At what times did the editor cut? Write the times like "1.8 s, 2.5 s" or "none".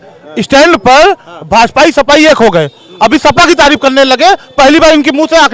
none

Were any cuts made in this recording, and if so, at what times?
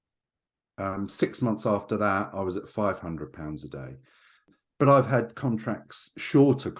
4.5 s

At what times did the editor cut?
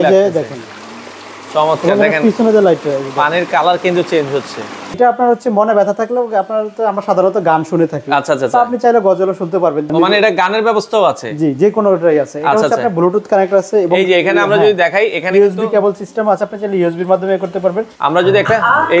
5.0 s, 9.9 s, 17.9 s

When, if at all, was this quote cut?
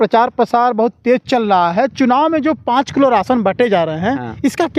none

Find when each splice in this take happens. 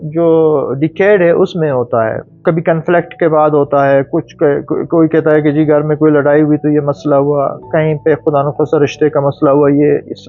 2.4 s

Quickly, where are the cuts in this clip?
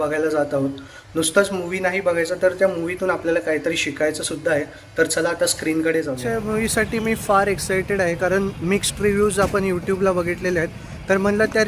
6.2 s

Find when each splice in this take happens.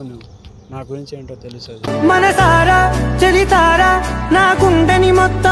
none

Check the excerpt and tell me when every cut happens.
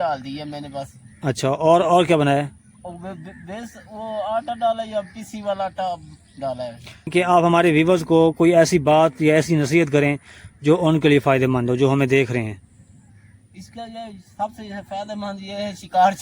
7.1 s

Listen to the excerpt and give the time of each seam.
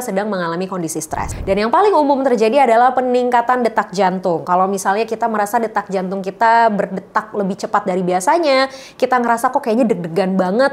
1.3 s

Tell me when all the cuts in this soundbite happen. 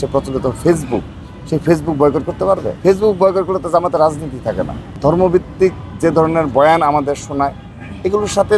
2.7 s, 4.8 s

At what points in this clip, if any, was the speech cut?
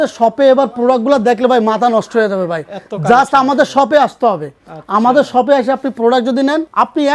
none

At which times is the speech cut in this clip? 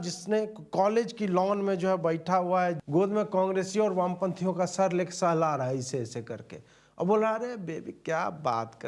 2.8 s

